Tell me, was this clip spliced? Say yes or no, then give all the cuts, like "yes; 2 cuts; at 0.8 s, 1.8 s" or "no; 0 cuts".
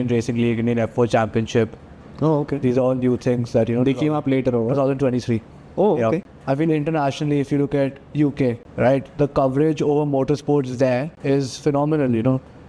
yes; 3 cuts; at 6.3 s, 8.6 s, 11.1 s